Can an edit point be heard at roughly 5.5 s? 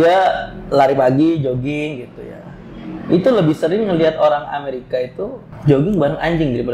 yes; 1 cut; at 5.5 s

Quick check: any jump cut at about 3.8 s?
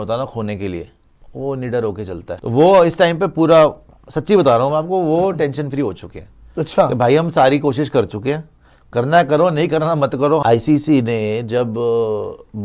no; 2 cuts; at 2.3 s, 10.4 s

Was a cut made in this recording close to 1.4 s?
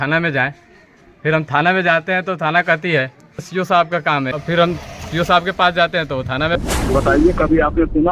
no; 3 cuts; at 3.5 s, 4.3 s, 6.6 s

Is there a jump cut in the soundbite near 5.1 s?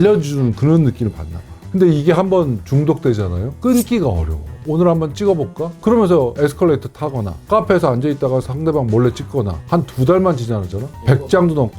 no; 2 cuts; at 7.5 s, 9.6 s

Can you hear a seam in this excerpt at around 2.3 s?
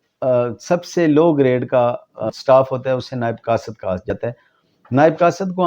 yes; 2 cuts; at 2.3 s, 4.1 s

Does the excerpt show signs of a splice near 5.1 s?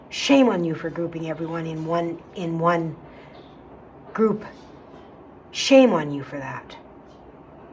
no; 0 cuts

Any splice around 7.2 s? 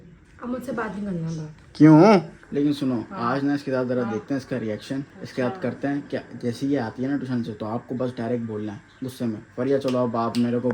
no; 1 cut; at 2.5 s

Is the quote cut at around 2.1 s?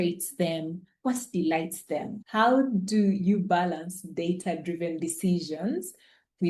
yes; 1 cut; at 2.1 s

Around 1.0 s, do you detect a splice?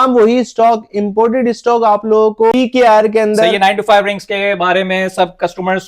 no; 2 cuts; at 2.5 s, 3.5 s

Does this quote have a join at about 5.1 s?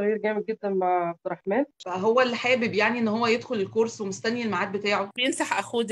yes; 2 cuts; at 1.8 s, 5.1 s

